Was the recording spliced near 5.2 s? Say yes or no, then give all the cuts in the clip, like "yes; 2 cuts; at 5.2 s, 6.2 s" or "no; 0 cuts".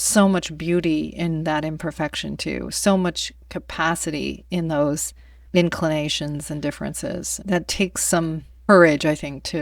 no; 2 cuts; at 7.3 s, 8.5 s